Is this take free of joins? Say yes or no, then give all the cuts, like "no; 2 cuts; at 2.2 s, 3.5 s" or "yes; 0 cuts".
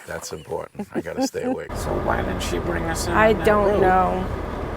no; 1 cut; at 1.7 s